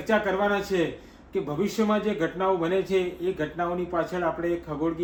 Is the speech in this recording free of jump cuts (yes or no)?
yes